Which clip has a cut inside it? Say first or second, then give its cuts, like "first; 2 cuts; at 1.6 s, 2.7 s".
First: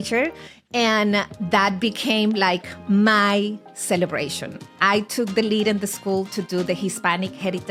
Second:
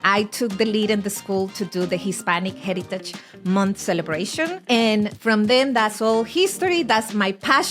second; 2 cuts; at 4.6 s, 5.2 s